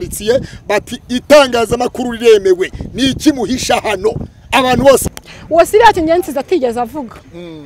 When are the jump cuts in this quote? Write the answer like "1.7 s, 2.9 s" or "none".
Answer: 5.0 s